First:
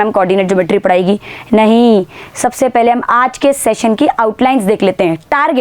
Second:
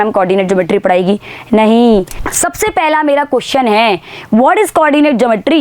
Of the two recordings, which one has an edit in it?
second; 1 cut; at 2.2 s

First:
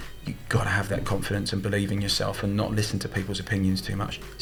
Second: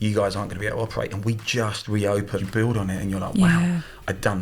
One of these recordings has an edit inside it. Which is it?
second; 1 cut; at 2.4 s

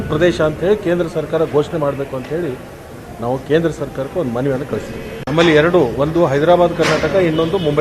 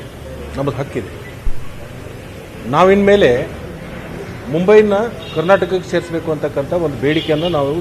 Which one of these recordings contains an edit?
first; 1 cut; at 5.1 s

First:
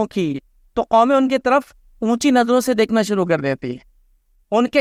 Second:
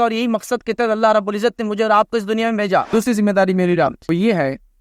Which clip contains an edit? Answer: second; 2 cuts; at 2.9 s, 4.0 s

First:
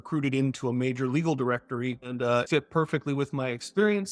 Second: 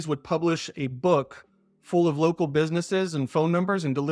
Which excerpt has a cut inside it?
first; 1 cut; at 2.4 s

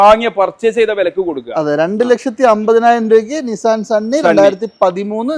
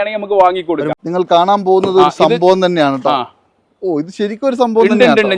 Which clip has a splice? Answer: second; 1 cut; at 0.9 s

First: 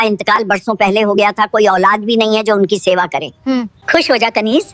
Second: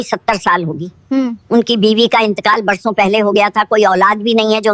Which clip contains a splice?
first; 1 cut; at 3.5 s

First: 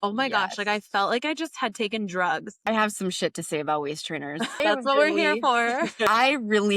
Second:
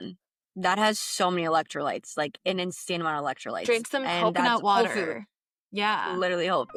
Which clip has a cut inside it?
first; 3 cuts; at 2.5 s, 4.6 s, 6.1 s

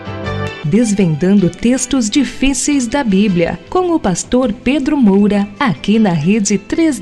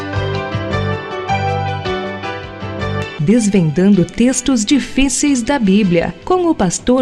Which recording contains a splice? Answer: first; 1 cut; at 5.5 s

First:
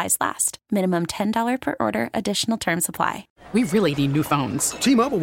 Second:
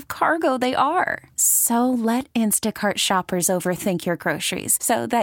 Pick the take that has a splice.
first; 1 cut; at 3.3 s

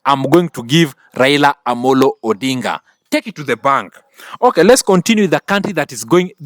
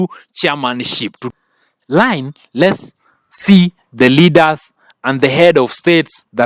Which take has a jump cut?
second; 1 cut; at 1.2 s

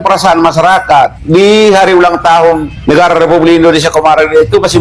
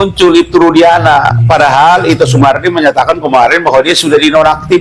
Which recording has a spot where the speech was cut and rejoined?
first; 2 cuts; at 1.2 s, 2.7 s

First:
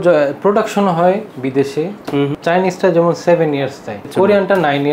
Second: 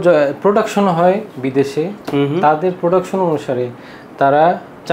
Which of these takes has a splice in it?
first; 2 cuts; at 2.3 s, 4.1 s

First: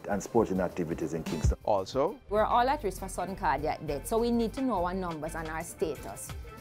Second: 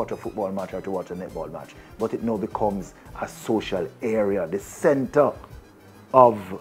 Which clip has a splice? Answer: first; 1 cut; at 1.9 s

